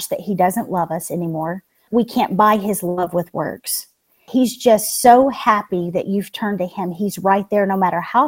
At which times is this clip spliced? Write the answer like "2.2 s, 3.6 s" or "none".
1.8 s, 4.2 s